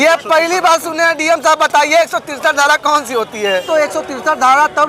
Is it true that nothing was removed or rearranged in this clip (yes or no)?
no